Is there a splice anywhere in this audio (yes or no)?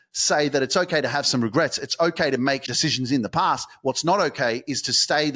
yes